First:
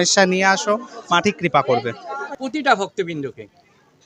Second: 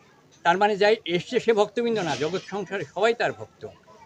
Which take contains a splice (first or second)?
first